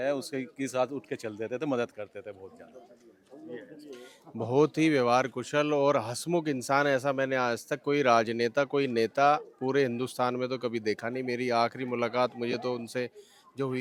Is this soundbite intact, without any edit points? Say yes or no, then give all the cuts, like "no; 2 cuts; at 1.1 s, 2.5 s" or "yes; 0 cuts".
yes; 0 cuts